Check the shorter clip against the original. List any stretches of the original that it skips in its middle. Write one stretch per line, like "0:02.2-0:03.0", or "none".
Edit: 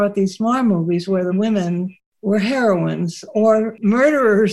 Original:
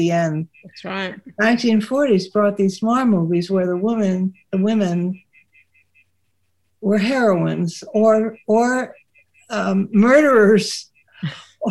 0:03.8-0:04.6
0:05.3-0:06.6
0:08.4-0:09.9